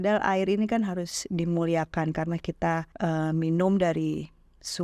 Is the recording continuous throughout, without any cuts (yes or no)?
no